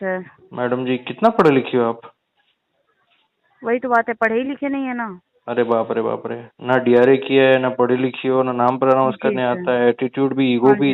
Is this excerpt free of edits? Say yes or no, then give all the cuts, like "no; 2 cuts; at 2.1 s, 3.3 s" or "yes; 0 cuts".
yes; 0 cuts